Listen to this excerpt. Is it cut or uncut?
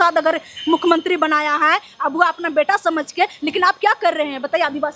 uncut